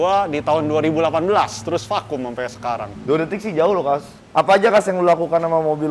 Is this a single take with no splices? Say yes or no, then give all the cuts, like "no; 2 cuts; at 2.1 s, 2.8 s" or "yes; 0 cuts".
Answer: yes; 0 cuts